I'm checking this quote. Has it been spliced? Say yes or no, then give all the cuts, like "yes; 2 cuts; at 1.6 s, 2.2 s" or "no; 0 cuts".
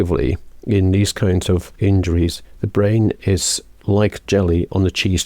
yes; 2 cuts; at 1.7 s, 4.2 s